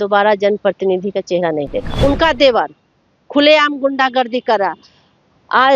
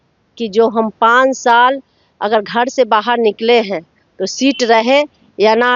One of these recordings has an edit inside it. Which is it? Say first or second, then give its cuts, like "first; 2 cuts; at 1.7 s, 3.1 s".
first; 1 cut; at 1.9 s